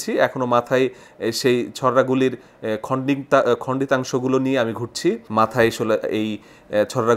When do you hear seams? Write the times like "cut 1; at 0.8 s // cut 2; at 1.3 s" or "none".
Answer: cut 1; at 5.2 s